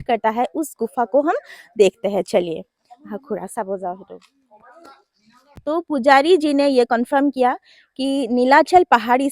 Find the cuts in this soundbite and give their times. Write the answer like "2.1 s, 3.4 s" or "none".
5.4 s